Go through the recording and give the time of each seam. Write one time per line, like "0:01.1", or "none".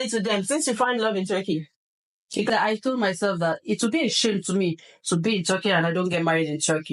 0:02.5